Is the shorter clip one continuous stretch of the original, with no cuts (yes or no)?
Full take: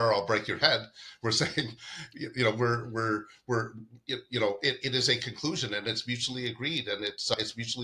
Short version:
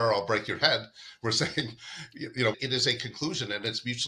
no